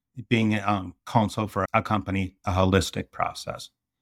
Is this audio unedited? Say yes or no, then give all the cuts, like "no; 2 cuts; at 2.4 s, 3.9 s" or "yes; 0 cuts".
no; 1 cut; at 1.7 s